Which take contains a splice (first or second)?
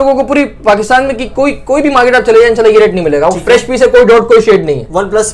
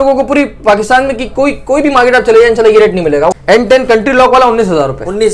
second